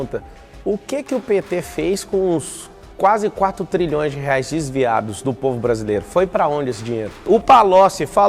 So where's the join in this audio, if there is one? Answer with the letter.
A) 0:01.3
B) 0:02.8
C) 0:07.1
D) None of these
C